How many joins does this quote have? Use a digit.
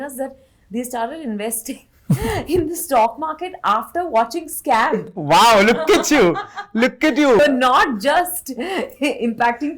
0